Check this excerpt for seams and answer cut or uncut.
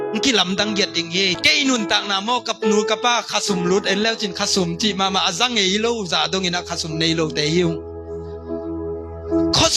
cut